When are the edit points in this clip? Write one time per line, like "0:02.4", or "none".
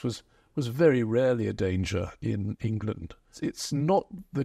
0:03.3